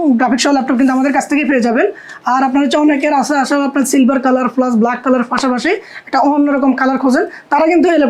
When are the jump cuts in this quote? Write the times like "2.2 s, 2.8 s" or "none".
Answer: none